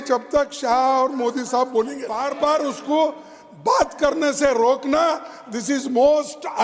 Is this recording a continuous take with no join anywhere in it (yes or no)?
no